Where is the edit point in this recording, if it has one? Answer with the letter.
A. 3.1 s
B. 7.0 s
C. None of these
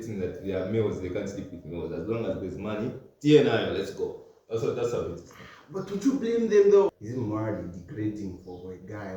B